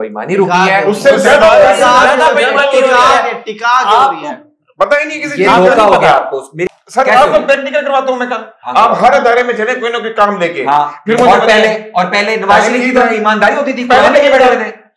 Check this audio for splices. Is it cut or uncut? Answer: uncut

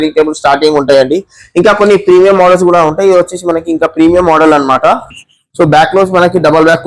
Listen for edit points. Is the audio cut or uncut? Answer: uncut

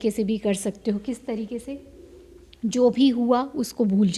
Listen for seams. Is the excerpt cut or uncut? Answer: uncut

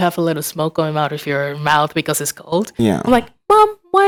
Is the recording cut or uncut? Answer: uncut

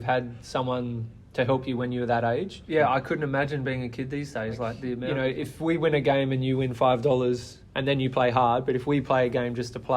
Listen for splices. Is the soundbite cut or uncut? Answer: cut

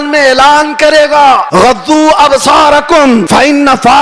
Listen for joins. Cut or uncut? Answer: cut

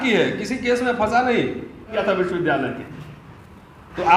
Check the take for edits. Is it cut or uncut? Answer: cut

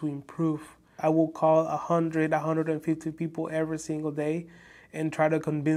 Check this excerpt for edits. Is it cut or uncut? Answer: cut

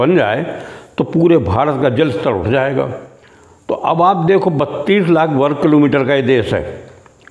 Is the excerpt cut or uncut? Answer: uncut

